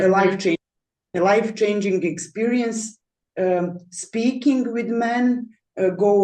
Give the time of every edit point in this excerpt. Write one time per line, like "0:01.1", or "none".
none